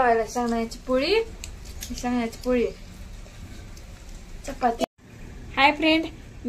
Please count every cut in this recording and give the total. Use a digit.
1